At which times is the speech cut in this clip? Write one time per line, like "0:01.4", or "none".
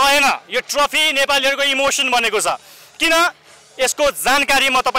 none

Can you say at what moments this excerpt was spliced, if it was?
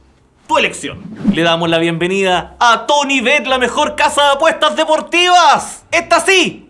0:01.2

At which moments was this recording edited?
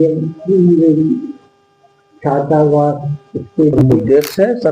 0:03.8

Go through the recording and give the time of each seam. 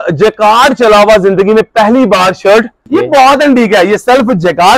0:02.8

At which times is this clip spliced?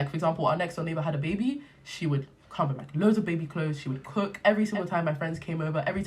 0:04.3

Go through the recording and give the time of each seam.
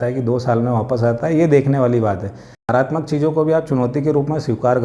0:02.6

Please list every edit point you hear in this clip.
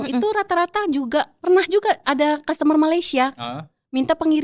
0:01.3

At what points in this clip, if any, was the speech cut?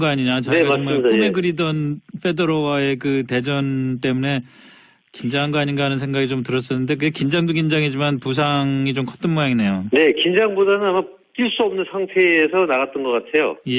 0:05.7

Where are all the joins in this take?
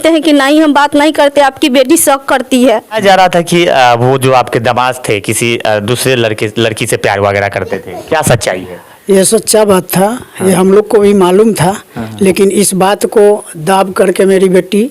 0:03.0

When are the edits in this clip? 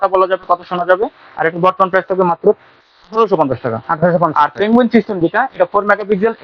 none

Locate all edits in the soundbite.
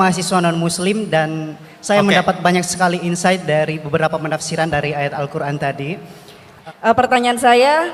0:06.5

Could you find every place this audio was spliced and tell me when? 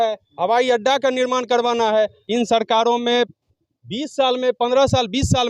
0:02.2

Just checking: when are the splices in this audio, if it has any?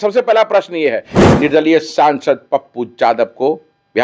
0:01.1

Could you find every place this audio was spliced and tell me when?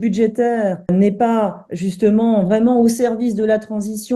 0:00.9

